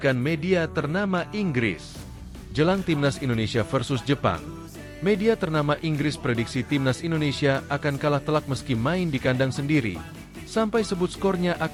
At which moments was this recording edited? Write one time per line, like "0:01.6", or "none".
none